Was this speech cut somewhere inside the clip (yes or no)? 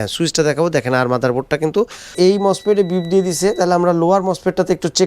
yes